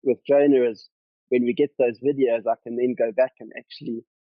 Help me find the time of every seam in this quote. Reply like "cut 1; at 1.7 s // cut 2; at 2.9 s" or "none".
none